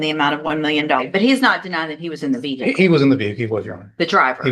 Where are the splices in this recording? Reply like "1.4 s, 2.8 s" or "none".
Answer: 1.0 s